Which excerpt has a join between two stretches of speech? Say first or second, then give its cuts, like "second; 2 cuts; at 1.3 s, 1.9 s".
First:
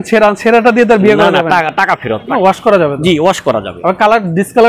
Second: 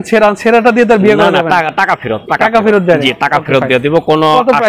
first; 1 cut; at 2.3 s